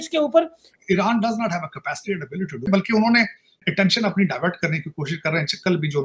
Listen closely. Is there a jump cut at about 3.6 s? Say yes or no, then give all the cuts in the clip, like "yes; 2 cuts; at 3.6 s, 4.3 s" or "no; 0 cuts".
yes; 2 cuts; at 2.6 s, 3.6 s